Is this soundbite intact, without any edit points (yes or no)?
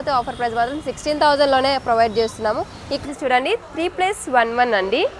no